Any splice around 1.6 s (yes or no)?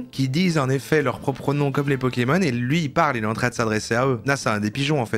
no